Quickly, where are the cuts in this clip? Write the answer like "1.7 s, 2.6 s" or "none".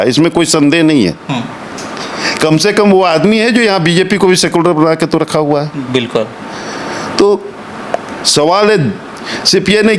none